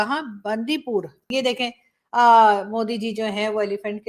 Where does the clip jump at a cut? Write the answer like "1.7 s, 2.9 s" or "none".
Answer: 1.3 s